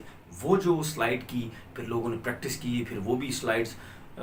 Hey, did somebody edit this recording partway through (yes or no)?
no